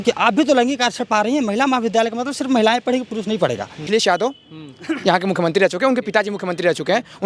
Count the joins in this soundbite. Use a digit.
1